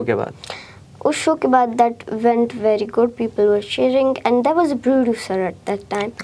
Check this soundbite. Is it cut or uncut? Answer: uncut